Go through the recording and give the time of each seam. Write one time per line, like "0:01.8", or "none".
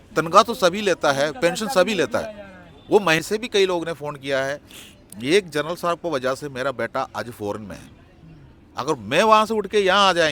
0:03.2